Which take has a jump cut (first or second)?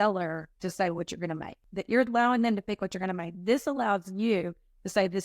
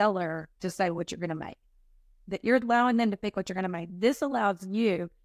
first